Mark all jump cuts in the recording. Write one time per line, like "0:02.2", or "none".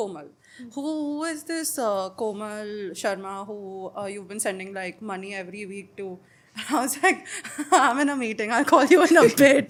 none